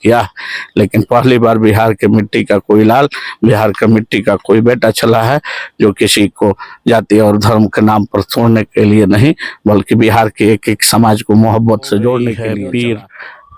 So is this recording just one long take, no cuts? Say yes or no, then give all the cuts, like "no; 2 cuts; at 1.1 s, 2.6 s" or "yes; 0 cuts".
no; 1 cut; at 12.4 s